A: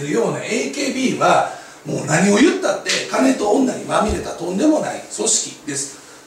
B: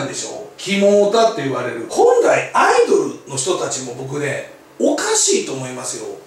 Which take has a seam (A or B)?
B